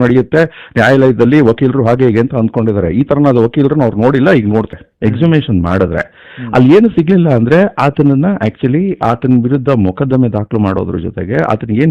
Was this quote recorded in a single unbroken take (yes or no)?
no